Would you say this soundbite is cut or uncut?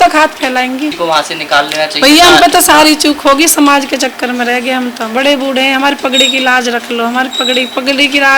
cut